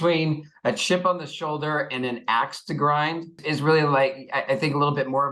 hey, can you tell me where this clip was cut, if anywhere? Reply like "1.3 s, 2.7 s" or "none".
3.4 s

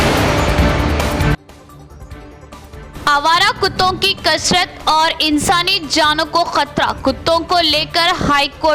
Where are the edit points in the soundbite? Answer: 1.1 s

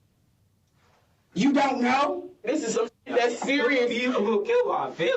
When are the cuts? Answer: 2.5 s

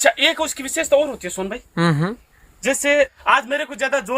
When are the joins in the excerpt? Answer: 3.2 s

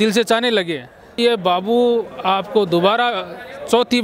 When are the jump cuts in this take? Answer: 1.2 s

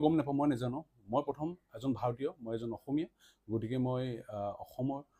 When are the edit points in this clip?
none

